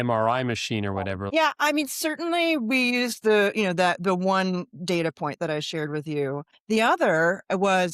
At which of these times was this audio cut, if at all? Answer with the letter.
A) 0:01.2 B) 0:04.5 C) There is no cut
A